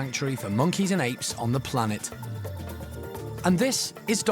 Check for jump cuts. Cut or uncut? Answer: cut